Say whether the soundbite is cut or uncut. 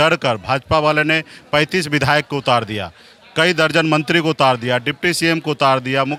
uncut